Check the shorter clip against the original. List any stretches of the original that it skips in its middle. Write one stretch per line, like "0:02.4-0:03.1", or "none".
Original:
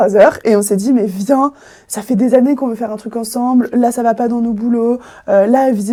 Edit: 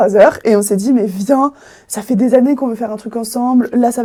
none